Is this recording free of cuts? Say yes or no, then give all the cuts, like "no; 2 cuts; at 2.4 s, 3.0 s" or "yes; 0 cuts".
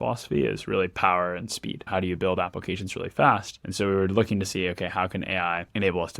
no; 2 cuts; at 1.8 s, 3.6 s